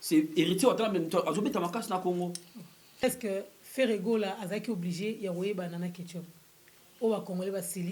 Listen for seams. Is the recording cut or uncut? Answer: cut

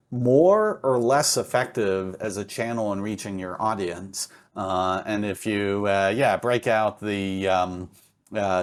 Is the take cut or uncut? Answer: uncut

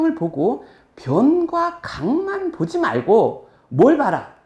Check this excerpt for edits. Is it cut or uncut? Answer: uncut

